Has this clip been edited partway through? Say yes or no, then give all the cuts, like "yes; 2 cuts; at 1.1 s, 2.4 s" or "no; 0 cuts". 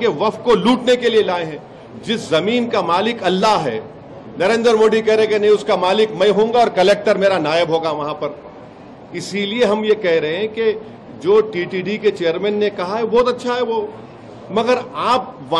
no; 0 cuts